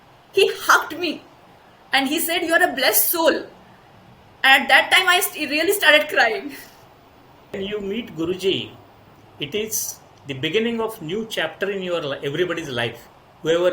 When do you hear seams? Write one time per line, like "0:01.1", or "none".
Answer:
0:07.6